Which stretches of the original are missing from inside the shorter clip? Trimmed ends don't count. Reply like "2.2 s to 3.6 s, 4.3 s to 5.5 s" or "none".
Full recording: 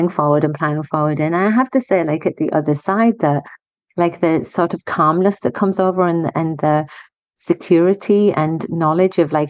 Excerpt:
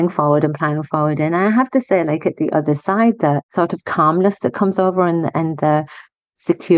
3.5 s to 4.5 s